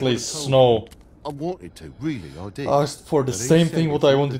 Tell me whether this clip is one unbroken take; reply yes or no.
yes